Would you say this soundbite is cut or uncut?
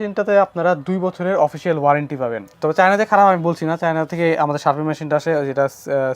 cut